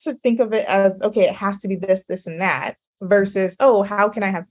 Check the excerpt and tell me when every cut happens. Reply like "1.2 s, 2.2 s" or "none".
none